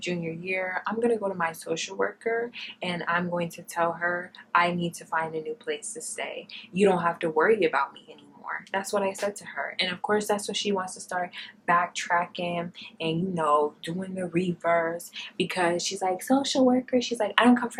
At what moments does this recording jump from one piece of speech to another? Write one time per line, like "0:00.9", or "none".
none